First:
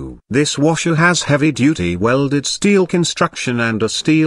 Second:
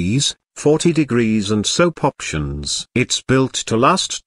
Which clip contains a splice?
second; 1 cut; at 2.3 s

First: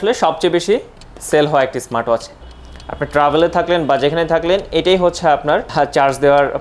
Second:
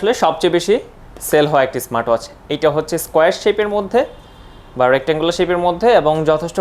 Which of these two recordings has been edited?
first; 2 cuts; at 2.4 s, 5.7 s

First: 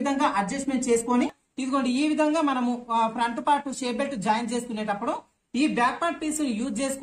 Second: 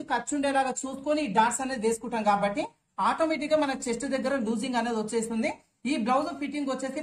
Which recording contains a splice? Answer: first; 1 cut; at 1.4 s

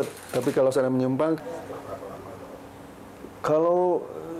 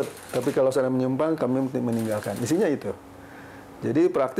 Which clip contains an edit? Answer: first; 1 cut; at 1.4 s

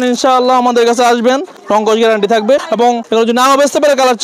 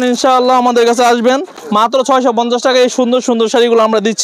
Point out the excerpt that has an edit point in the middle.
first; 2 cuts; at 1.6 s, 2.9 s

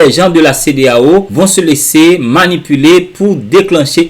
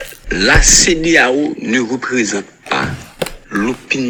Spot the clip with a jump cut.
first; 1 cut; at 1.3 s

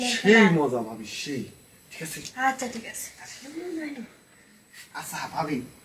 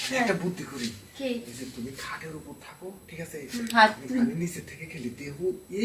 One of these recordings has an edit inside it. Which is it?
first; 1 cut; at 4.8 s

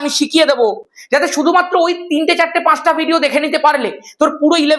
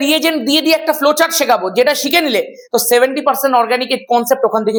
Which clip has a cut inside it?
first; 1 cut; at 0.9 s

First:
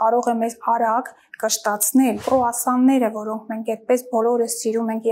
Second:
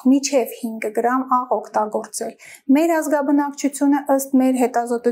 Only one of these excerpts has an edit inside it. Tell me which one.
first; 1 cut; at 2.2 s

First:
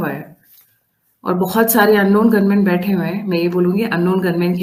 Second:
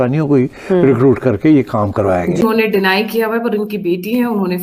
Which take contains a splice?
second; 1 cut; at 2.4 s

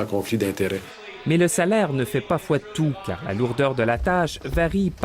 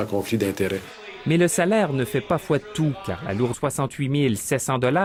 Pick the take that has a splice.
first; 1 cut; at 3.6 s

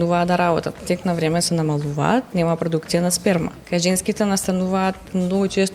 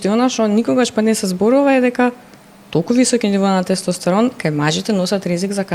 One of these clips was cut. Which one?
first; 3 cuts; at 0.8 s, 2.3 s, 3.6 s

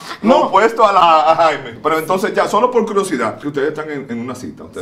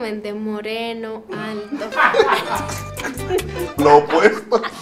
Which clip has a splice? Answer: first; 2 cuts; at 1.0 s, 3.4 s

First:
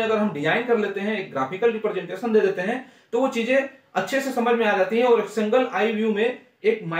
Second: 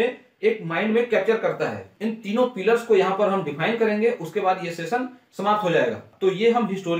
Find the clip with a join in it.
second; 2 cuts; at 1.9 s, 6.1 s

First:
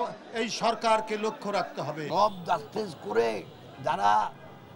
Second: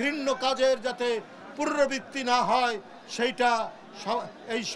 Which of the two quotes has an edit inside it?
first; 1 cut; at 2.0 s

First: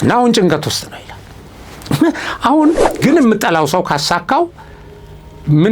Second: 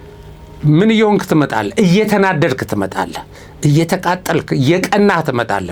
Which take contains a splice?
first; 1 cut; at 2.9 s

